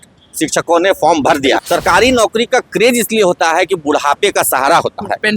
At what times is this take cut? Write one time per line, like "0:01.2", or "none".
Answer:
0:01.6